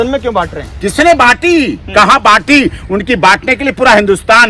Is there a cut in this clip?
no; 0 cuts

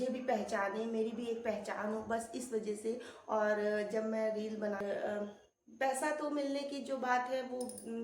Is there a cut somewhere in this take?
yes; 1 cut; at 4.8 s

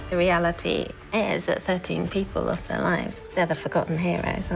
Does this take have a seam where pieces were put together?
yes; 1 cut; at 3.1 s

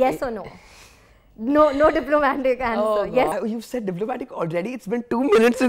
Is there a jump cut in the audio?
yes; 1 cut; at 3.3 s

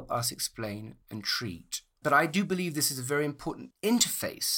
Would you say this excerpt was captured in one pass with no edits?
no; 1 cut; at 1.4 s

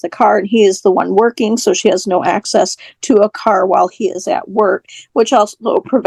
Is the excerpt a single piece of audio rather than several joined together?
yes; 0 cuts

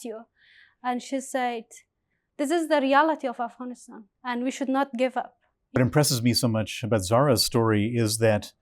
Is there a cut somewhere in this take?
yes; 1 cut; at 5.8 s

